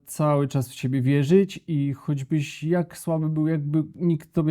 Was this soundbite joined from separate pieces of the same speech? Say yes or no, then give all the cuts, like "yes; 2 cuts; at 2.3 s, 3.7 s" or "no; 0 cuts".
no; 0 cuts